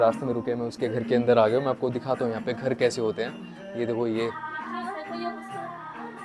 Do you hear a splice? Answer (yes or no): no